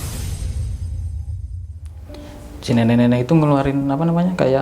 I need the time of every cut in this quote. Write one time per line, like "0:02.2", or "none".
0:02.1